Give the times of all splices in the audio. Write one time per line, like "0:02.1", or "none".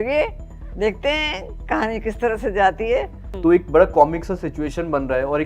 0:03.2